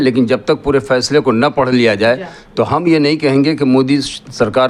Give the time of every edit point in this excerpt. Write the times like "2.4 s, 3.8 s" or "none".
none